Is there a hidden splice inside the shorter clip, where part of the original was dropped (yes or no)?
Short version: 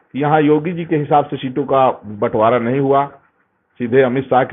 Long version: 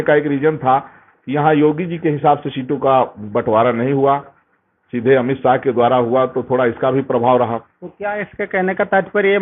no